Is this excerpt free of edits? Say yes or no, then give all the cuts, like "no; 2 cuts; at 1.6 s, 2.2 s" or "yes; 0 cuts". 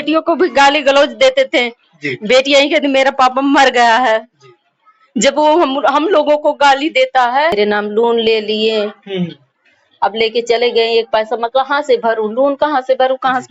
no; 1 cut; at 7.5 s